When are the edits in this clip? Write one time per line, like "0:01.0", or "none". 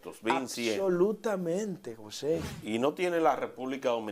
0:02.5